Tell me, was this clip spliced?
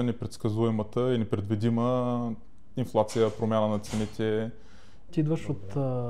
yes; 1 cut; at 5.1 s

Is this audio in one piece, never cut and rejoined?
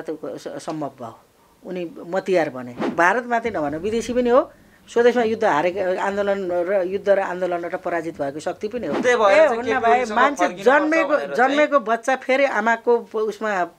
no; 2 cuts; at 2.9 s, 9.0 s

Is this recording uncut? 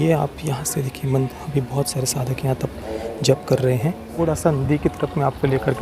no; 1 cut; at 4.2 s

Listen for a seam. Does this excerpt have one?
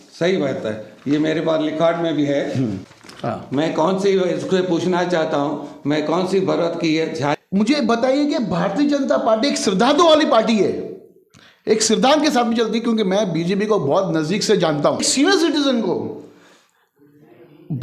yes; 3 cuts; at 2.8 s, 7.4 s, 15.1 s

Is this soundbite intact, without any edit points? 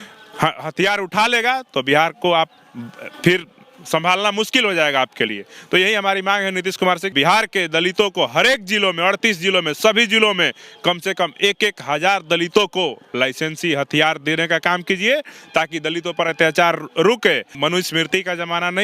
no; 2 cuts; at 7.1 s, 17.5 s

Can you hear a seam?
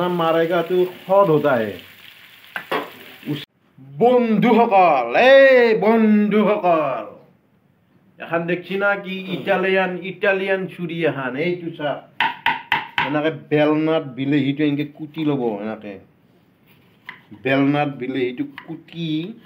yes; 1 cut; at 3.5 s

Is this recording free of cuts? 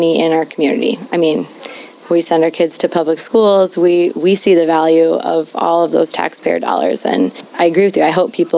no; 1 cut; at 7.4 s

